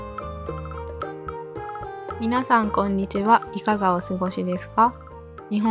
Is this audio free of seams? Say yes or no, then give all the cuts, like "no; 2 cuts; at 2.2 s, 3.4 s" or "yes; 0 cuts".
no; 1 cut; at 2.2 s